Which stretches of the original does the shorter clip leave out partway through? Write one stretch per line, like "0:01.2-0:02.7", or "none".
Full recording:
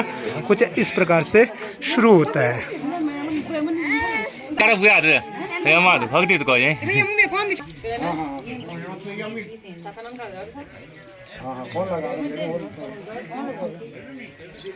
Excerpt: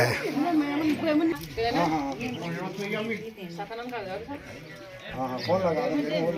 0:03.8-0:07.6